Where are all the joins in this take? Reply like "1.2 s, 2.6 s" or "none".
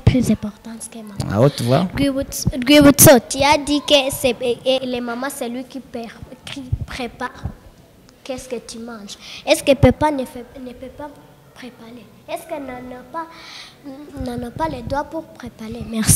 4.8 s

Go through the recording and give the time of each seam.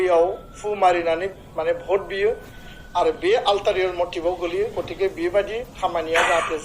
none

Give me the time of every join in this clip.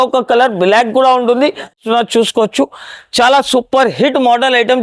1.8 s

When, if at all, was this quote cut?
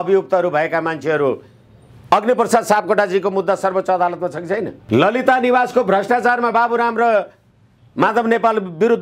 4.8 s

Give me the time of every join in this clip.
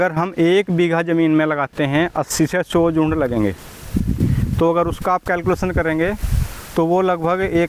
none

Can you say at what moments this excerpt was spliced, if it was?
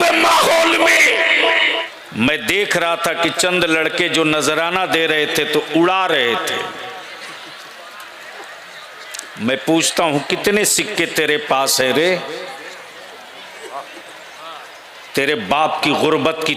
2.0 s

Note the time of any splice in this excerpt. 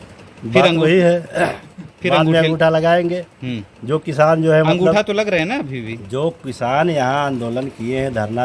none

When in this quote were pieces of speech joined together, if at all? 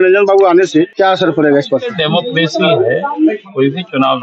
0.9 s, 2.0 s

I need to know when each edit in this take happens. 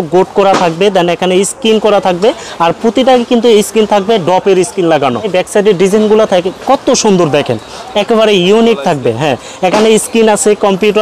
none

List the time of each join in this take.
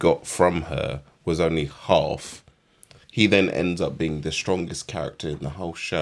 none

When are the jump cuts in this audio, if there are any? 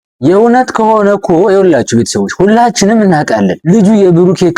3.6 s

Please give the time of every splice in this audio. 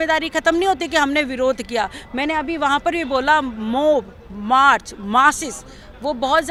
none

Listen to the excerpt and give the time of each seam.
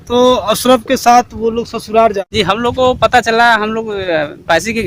2.2 s

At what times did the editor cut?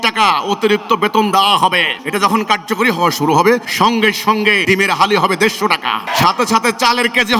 2.0 s, 3.7 s, 4.6 s, 6.1 s

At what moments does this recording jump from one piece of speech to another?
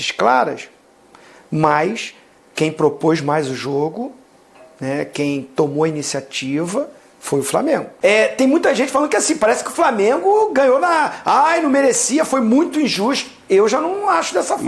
7.9 s

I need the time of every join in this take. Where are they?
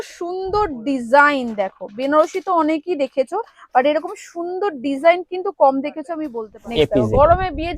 6.2 s

